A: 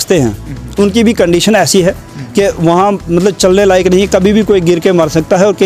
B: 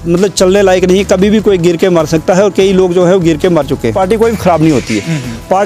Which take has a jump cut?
B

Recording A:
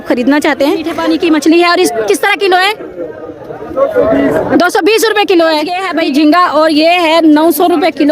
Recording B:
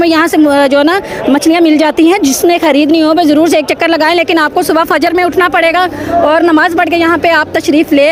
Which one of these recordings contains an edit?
A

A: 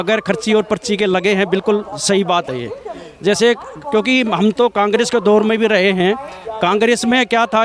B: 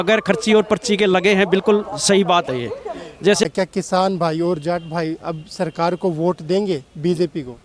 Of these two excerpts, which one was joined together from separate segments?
B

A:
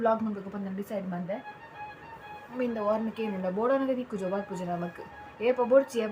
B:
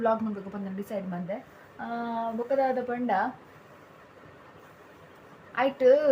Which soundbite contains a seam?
A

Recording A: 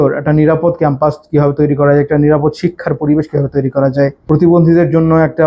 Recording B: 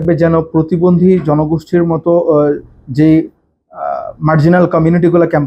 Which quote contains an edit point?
A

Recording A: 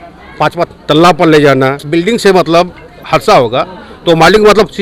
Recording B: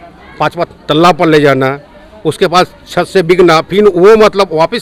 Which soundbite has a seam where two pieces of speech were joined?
A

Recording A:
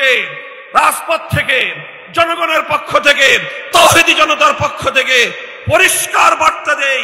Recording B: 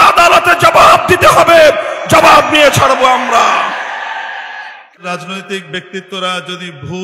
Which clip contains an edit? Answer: B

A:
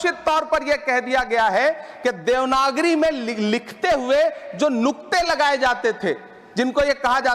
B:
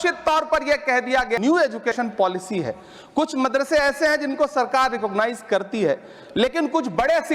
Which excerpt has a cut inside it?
B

